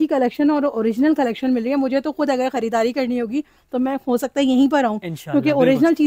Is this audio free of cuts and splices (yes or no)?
yes